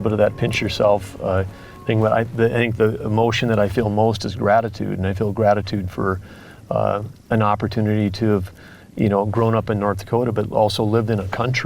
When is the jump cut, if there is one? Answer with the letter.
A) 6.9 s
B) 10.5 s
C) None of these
C